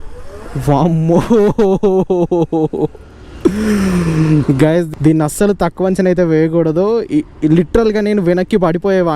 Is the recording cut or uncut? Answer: uncut